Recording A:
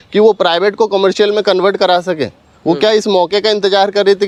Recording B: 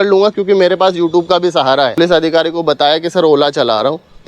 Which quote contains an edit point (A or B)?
B